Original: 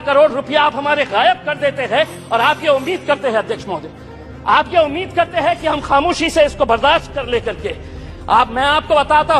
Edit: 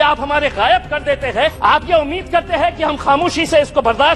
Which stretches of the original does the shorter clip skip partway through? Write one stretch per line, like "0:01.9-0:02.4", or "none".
0:02.1-0:04.4